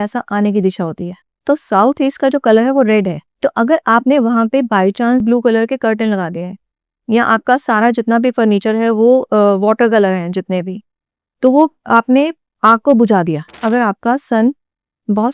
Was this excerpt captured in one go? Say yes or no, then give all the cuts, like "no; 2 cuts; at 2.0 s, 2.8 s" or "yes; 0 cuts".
no; 2 cuts; at 1.3 s, 13.6 s